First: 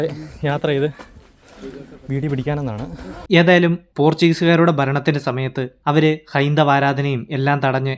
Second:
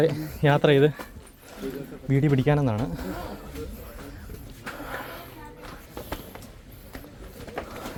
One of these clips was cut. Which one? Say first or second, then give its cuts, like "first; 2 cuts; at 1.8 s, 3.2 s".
first; 1 cut; at 3.2 s